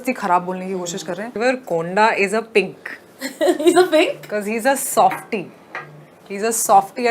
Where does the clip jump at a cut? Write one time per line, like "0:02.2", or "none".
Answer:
0:01.4